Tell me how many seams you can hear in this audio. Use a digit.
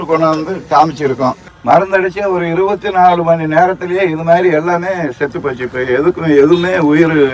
1